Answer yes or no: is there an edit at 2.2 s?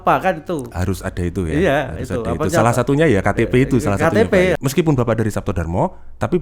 no